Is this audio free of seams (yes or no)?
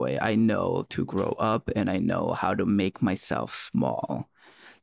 yes